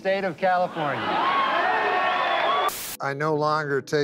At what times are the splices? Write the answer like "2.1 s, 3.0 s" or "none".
2.7 s